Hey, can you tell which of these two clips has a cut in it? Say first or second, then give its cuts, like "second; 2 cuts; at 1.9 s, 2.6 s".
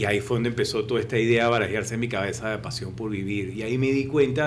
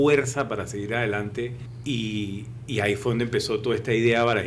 second; 1 cut; at 1.7 s